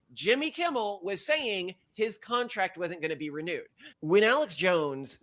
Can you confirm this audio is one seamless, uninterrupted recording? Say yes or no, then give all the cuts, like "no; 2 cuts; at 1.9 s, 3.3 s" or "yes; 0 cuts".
no; 1 cut; at 3.9 s